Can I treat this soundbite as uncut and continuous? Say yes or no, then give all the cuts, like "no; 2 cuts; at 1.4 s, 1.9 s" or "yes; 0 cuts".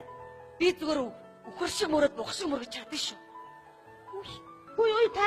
no; 1 cut; at 2.1 s